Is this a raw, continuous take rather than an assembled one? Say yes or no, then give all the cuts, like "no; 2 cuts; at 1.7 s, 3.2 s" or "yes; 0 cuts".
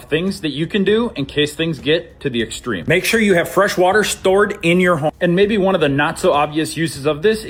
yes; 0 cuts